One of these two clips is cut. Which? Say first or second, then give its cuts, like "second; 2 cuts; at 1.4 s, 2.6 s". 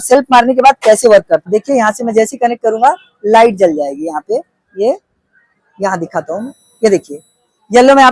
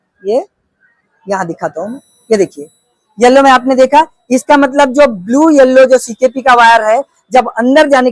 first; 1 cut; at 1.6 s